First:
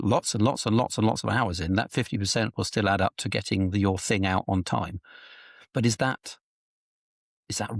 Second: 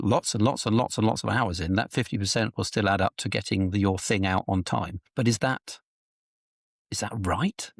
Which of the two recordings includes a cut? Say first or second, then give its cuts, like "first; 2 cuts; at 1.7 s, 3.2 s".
second; 1 cut; at 5.0 s